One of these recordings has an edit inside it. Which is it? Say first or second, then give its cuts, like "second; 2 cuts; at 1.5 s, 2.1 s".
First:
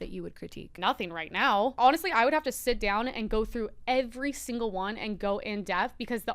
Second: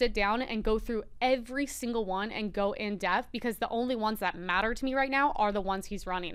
first; 2 cuts; at 0.8 s, 1.7 s